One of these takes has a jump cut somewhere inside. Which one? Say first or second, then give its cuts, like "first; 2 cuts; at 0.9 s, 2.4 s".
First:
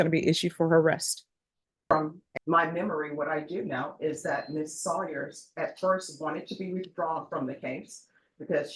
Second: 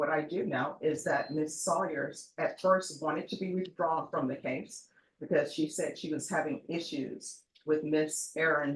first; 1 cut; at 1.9 s